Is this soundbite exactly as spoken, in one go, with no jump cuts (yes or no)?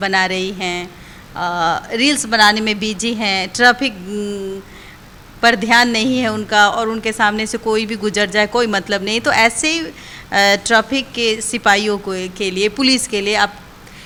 yes